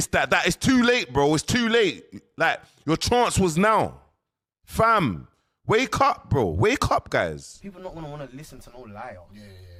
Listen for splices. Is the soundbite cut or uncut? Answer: uncut